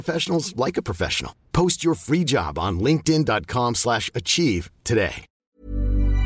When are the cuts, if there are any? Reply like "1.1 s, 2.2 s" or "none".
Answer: 5.3 s